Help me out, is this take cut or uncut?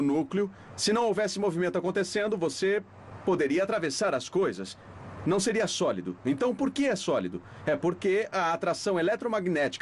uncut